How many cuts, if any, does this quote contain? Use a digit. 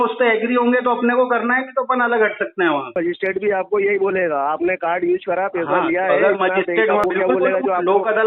2